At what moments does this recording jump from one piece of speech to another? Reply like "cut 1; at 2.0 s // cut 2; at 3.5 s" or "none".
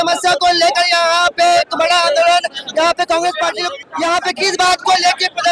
cut 1; at 3.8 s